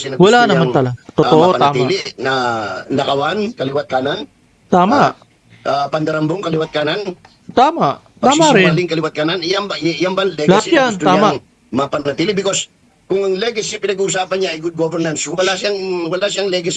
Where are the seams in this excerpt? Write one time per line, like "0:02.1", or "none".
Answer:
none